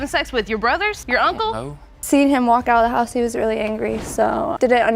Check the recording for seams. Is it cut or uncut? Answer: cut